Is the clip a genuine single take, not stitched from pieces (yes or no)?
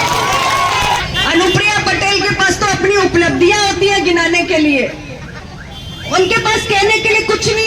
no